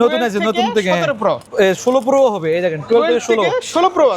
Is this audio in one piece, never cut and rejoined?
no; 1 cut; at 1.5 s

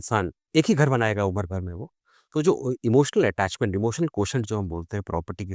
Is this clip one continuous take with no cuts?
yes; 0 cuts

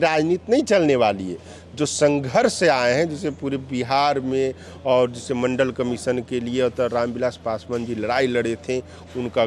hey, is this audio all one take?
yes; 0 cuts

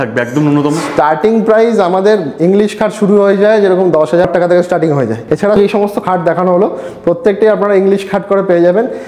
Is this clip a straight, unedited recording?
no; 2 cuts; at 4.3 s, 5.6 s

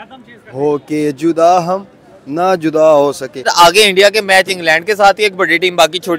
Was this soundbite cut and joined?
yes; 1 cut; at 3.5 s

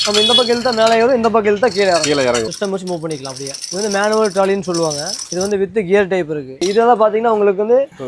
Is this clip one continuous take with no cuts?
no; 2 cuts; at 2.5 s, 6.6 s

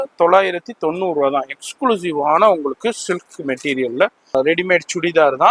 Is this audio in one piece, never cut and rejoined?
no; 1 cut; at 4.3 s

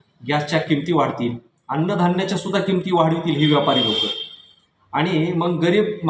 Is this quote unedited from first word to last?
yes; 0 cuts

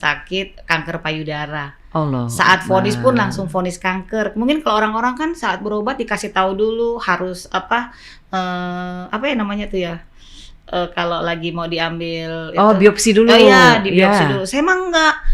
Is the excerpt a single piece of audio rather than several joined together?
yes; 0 cuts

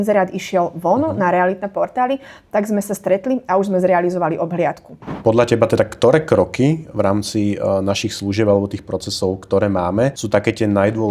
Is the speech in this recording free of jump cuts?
no; 2 cuts; at 5.1 s, 10.2 s

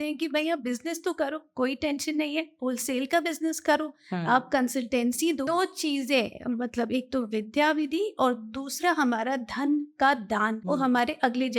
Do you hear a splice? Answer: yes; 2 cuts; at 5.5 s, 10.6 s

